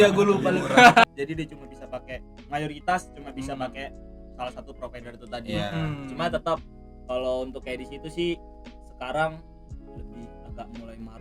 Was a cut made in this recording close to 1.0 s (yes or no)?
yes